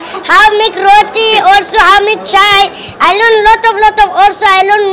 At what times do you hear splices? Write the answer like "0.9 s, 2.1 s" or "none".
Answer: none